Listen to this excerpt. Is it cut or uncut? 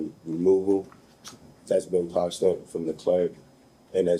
uncut